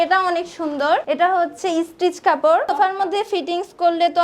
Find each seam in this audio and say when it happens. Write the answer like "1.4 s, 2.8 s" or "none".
1.0 s, 2.7 s